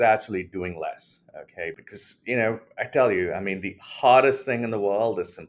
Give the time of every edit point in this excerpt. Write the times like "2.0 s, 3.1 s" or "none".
1.8 s